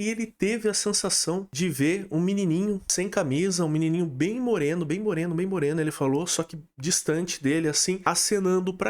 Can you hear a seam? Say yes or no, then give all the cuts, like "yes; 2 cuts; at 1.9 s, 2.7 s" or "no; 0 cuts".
yes; 3 cuts; at 1.5 s, 2.9 s, 8.0 s